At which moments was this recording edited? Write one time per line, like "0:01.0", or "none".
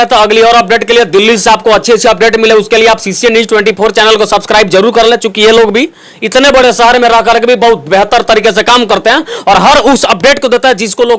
none